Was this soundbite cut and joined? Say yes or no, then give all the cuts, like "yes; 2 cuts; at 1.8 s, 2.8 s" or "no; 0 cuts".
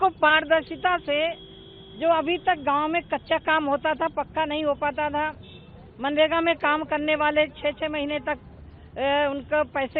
no; 0 cuts